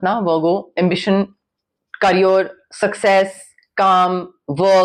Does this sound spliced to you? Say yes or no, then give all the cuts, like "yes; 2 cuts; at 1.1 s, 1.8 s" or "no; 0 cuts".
no; 0 cuts